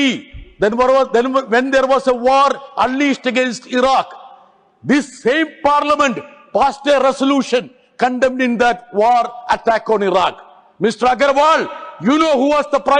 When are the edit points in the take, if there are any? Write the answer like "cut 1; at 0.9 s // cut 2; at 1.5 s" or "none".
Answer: none